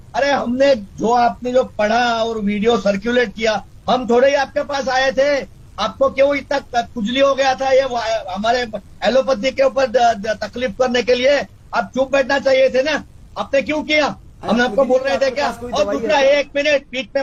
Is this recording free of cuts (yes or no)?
yes